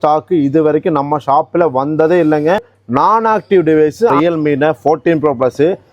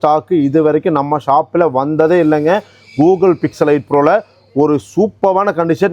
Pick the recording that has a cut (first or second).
first